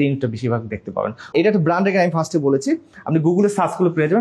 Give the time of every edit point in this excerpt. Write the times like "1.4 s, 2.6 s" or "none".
1.3 s